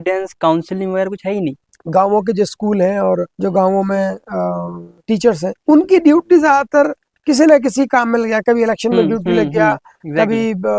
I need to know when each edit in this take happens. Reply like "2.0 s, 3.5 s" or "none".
1.7 s, 3.3 s, 5.4 s

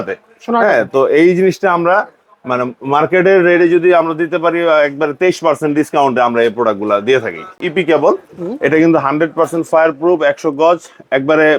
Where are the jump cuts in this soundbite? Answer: 7.6 s

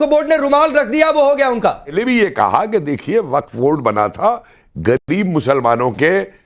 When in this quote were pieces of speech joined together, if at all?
1.9 s

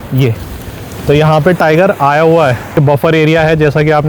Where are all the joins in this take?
2.8 s

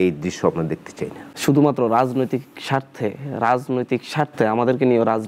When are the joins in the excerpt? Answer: 1.3 s

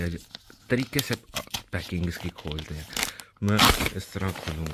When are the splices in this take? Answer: none

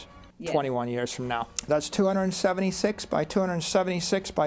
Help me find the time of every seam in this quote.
1.5 s

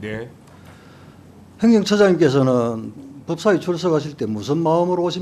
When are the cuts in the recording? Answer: none

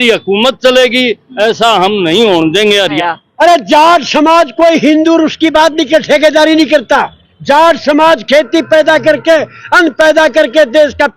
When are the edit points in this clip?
3.0 s

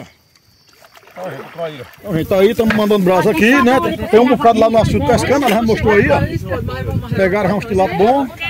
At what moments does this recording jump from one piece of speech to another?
1.9 s

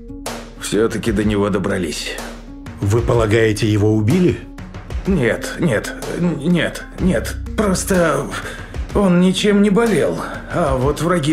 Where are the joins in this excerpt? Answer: none

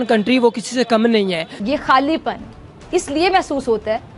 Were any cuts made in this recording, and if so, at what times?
1.5 s

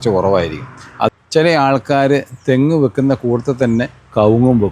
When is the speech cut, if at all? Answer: 1.1 s

